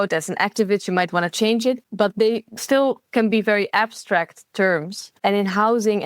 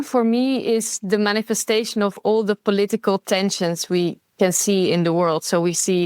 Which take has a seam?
first; 2 cuts; at 1.9 s, 5.0 s

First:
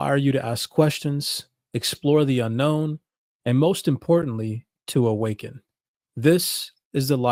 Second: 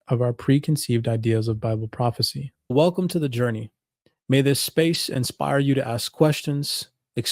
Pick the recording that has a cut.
second; 1 cut; at 2.7 s

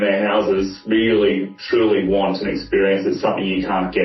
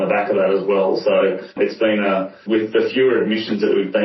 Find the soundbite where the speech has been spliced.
second; 2 cuts; at 1.5 s, 2.4 s

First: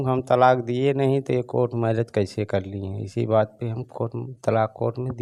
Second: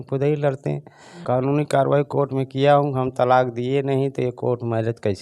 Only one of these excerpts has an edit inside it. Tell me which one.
second; 1 cut; at 1.2 s

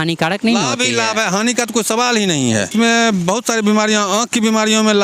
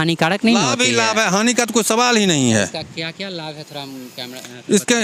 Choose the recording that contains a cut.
first; 1 cut; at 2.7 s

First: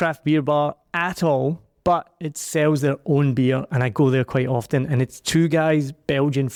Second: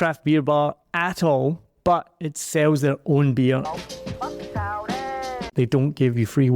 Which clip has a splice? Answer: second; 2 cuts; at 3.7 s, 5.5 s

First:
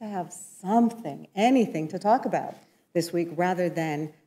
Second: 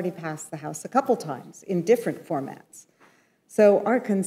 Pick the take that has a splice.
first; 1 cut; at 3.1 s

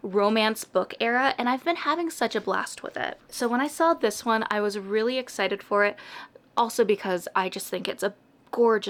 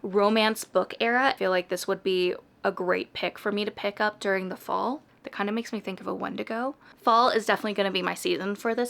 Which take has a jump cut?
second; 3 cuts; at 1.4 s, 5.0 s, 6.8 s

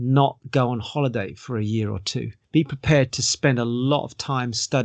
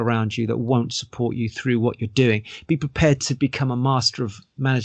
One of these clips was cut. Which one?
first; 1 cut; at 2.4 s

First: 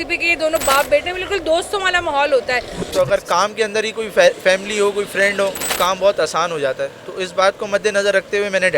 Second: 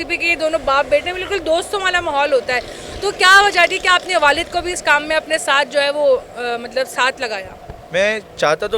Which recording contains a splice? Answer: first; 2 cuts; at 2.9 s, 5.7 s

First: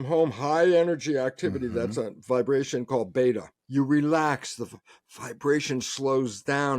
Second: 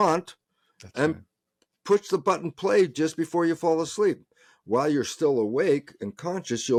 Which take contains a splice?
first; 1 cut; at 3.5 s

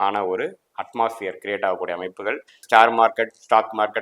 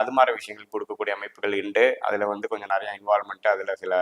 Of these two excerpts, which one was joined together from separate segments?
first; 1 cut; at 2.5 s

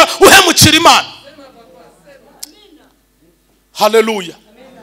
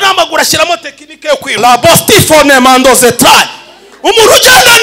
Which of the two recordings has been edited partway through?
second; 1 cut; at 1.6 s

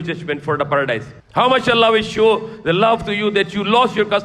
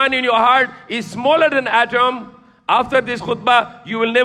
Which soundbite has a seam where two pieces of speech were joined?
first; 1 cut; at 1.2 s

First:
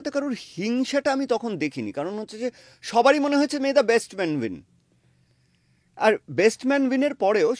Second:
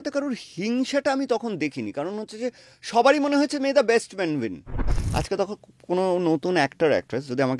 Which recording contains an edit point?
second; 1 cut; at 4.9 s

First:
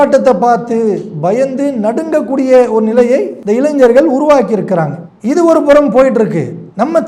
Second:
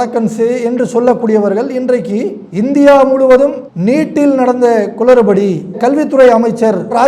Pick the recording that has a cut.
first; 1 cut; at 3.4 s

